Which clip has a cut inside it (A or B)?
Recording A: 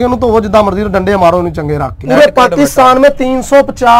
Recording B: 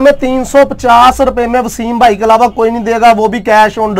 A